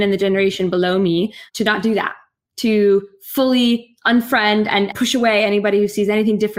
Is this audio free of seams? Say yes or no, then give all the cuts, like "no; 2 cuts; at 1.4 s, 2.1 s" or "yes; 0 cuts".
no; 1 cut; at 4.9 s